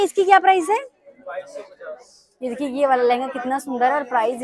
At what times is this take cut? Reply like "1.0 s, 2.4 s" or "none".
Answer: none